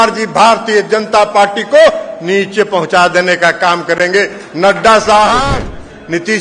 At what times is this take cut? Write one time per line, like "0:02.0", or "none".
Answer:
0:05.5